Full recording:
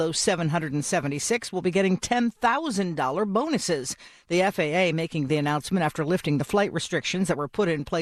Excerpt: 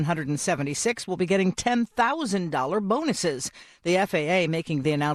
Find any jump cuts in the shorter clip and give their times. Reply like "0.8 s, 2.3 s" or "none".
none